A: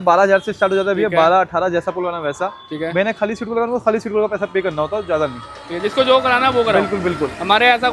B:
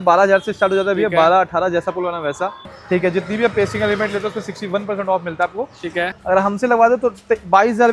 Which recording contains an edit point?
B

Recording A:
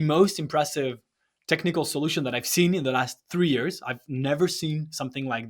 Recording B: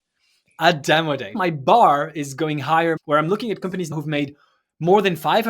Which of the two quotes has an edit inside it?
B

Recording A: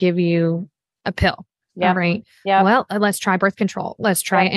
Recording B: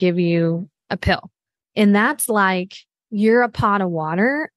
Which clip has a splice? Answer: B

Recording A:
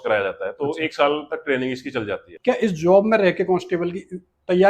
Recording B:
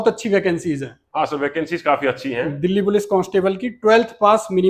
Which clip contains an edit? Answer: A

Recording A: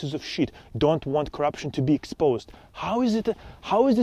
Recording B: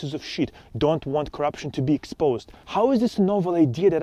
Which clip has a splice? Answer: B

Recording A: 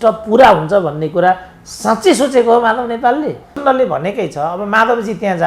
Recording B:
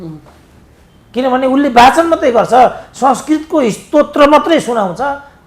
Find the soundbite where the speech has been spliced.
A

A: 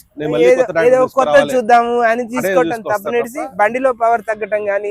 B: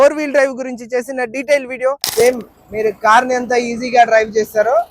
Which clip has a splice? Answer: B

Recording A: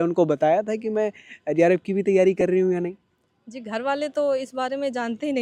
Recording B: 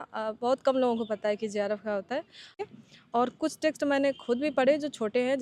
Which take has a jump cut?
B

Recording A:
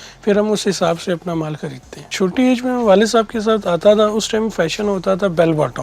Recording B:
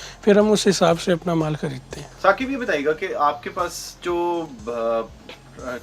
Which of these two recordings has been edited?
A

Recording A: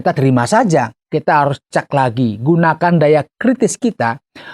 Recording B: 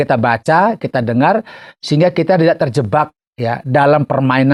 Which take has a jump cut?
A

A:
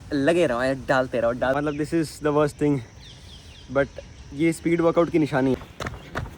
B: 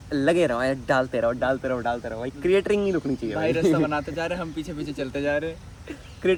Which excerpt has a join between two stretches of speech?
A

